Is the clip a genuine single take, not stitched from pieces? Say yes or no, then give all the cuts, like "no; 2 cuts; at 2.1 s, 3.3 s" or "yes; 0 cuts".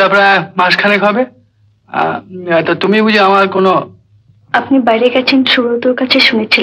yes; 0 cuts